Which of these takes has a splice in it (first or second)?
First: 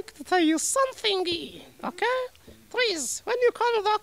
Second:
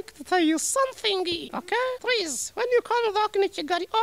second